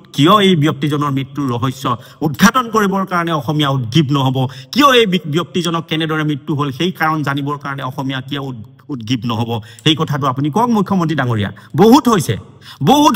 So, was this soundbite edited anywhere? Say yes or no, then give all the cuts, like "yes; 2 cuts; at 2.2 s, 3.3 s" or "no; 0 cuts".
no; 0 cuts